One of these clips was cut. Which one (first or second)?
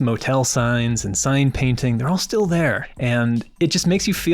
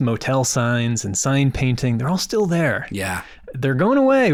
first